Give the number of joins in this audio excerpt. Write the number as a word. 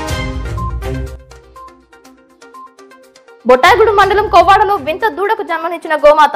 one